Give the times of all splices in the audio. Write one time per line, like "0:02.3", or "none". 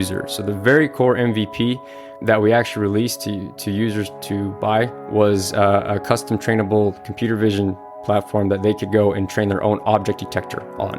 0:02.1